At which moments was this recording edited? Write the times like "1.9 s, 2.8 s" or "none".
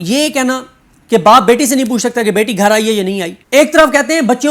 3.3 s